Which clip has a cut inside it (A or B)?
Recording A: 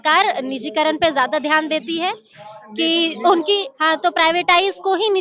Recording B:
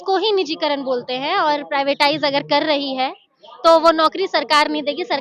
A